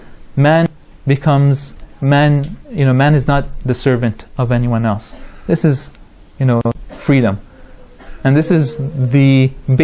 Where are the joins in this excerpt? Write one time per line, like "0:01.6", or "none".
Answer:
none